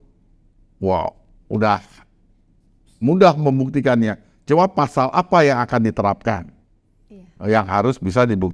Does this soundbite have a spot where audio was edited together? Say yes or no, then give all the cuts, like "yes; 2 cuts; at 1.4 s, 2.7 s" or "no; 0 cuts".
no; 0 cuts